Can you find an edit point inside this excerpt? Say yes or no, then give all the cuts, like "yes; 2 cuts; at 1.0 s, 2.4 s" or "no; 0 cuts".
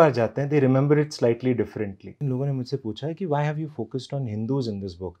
yes; 1 cut; at 2.2 s